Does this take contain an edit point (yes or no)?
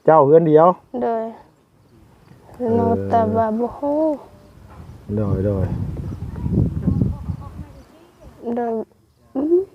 yes